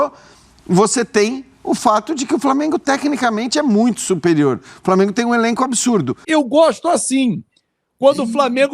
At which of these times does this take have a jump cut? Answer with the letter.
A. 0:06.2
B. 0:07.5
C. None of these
A